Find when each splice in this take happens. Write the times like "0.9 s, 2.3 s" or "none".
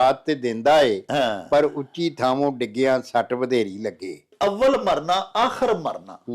4.3 s